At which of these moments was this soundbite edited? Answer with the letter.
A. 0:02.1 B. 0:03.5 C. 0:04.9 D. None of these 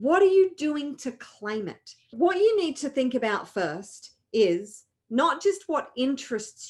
A